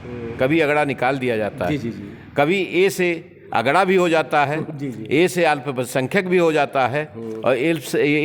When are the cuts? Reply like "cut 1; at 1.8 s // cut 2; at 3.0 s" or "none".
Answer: none